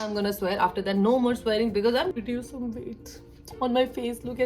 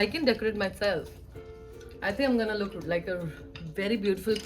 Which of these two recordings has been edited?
first; 1 cut; at 2.2 s

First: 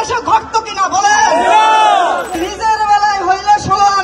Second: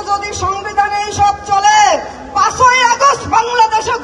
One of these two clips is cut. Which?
first; 1 cut; at 2.4 s

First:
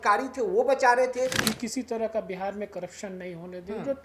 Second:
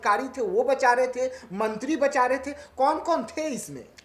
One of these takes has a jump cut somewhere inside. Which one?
first; 1 cut; at 1.4 s

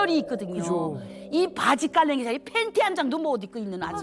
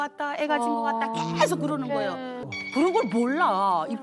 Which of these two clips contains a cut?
second; 1 cut; at 2.5 s

